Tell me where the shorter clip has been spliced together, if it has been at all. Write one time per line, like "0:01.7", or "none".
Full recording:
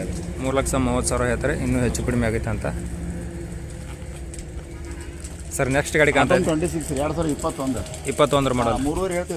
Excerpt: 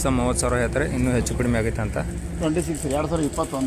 0:02.4